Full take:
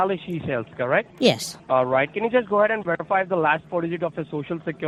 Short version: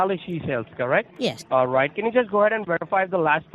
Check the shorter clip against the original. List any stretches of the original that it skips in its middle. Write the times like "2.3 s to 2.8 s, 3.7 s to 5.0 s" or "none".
1.2 s to 1.4 s